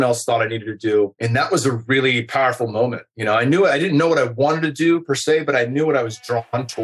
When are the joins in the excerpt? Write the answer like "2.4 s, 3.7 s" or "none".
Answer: none